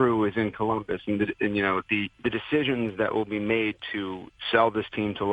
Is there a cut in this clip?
yes; 2 cuts; at 2.1 s, 4.4 s

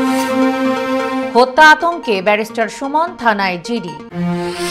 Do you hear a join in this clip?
yes; 1 cut; at 1.1 s

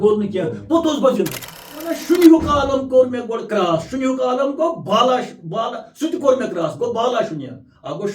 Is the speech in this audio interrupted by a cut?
yes; 1 cut; at 2.0 s

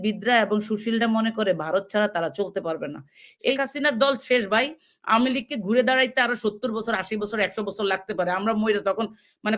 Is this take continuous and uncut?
no; 1 cut; at 3.5 s

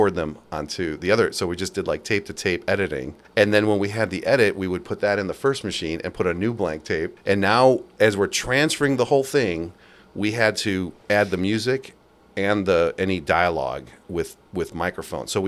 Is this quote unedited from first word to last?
no; 2 cuts; at 3.2 s, 7.1 s

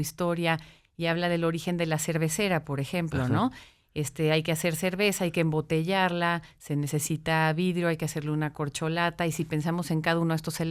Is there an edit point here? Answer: no; 0 cuts

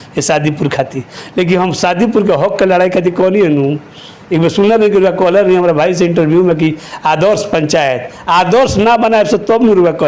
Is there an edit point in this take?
no; 0 cuts

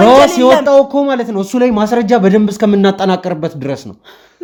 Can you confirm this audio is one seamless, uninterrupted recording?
yes; 0 cuts

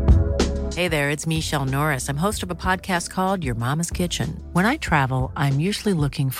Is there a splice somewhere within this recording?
no; 0 cuts

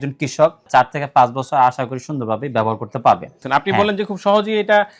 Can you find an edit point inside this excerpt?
yes; 1 cut; at 3.3 s

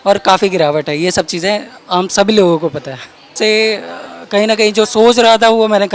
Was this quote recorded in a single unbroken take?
no; 1 cut; at 3.3 s

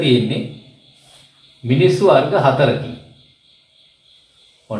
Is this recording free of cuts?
yes; 0 cuts

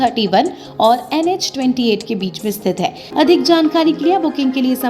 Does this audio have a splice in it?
yes; 1 cut; at 3.0 s

